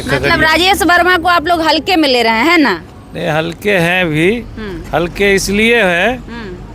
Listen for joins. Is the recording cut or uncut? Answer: uncut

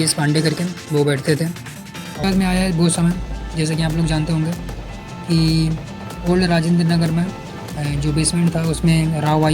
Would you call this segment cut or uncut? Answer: cut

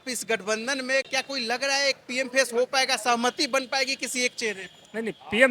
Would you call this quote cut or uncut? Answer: uncut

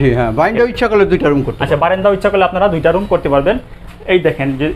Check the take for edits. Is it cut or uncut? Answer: uncut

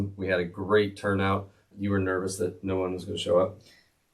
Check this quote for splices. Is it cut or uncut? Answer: cut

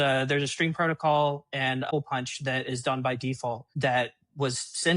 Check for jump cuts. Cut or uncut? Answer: cut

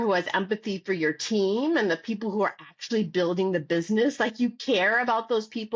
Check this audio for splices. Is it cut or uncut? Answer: uncut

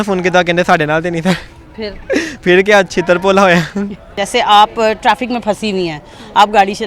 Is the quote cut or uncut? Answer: cut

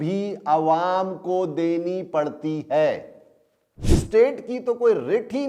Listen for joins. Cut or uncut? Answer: cut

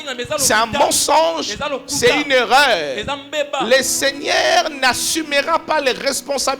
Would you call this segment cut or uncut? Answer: uncut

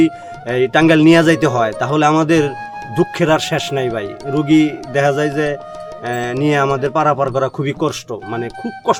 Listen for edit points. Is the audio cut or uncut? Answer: uncut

